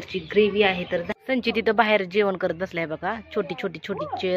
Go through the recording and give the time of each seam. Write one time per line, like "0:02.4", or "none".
0:01.1